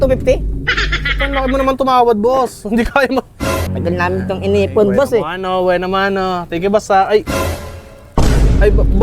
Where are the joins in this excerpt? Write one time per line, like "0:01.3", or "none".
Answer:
0:03.6